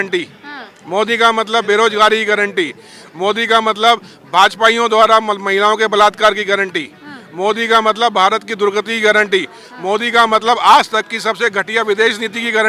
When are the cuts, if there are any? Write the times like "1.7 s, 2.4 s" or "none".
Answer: none

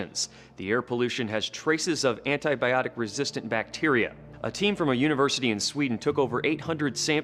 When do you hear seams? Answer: 4.9 s

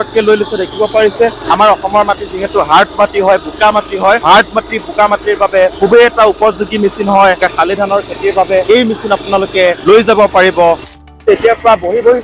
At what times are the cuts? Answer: 1.4 s, 4.2 s, 5.7 s, 7.4 s, 8.6 s, 9.8 s, 11.1 s

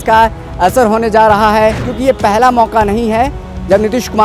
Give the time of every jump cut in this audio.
1.9 s

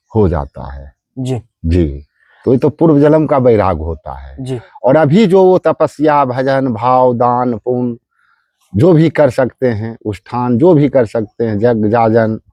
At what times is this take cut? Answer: none

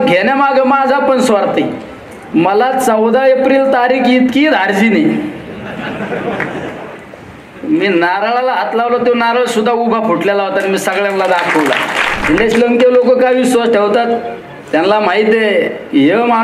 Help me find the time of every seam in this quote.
12.2 s

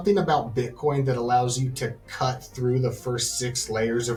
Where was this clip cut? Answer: none

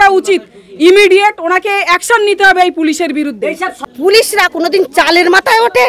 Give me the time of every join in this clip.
3.9 s

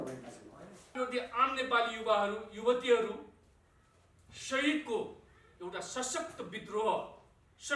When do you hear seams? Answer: 0.9 s

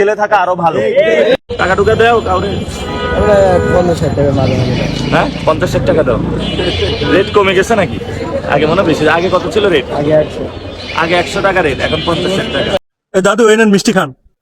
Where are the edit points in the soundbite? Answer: 1.5 s, 12.9 s

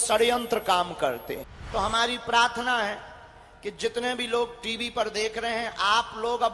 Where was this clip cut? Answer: 1.5 s

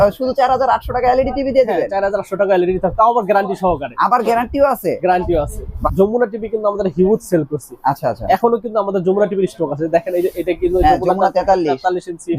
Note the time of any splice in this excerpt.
5.8 s

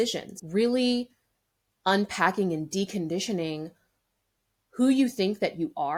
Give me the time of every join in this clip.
none

